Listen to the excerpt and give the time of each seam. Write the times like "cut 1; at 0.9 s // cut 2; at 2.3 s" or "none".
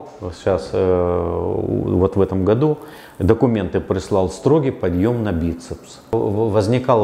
cut 1; at 6.1 s